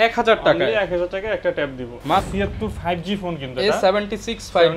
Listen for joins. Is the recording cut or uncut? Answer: cut